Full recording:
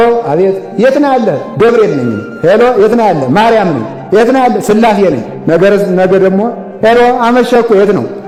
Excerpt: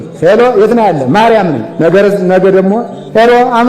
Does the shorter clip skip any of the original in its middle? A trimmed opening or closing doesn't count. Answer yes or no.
yes